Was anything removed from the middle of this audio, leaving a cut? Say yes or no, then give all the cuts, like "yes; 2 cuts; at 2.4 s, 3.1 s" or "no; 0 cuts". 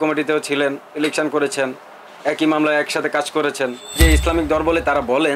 yes; 1 cut; at 3.9 s